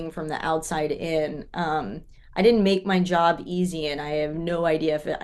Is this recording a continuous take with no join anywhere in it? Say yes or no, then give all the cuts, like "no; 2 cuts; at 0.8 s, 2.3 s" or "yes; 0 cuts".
yes; 0 cuts